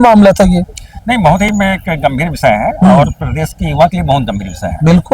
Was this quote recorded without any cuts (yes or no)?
yes